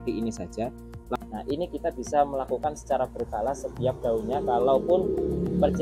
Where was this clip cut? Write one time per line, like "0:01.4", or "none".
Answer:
0:01.2